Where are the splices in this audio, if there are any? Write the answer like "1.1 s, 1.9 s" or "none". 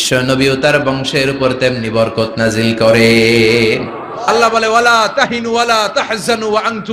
4.3 s